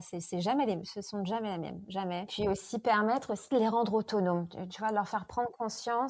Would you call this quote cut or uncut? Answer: uncut